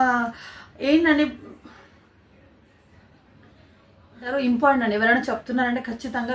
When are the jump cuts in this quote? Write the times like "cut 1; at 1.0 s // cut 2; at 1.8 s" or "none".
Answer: cut 1; at 4.3 s